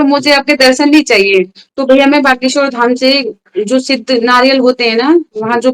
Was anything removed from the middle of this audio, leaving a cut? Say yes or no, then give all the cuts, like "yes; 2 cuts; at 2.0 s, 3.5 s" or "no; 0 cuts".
yes; 1 cut; at 1.6 s